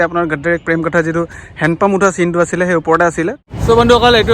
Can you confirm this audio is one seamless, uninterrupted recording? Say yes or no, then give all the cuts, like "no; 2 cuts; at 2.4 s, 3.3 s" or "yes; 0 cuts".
no; 1 cut; at 3.4 s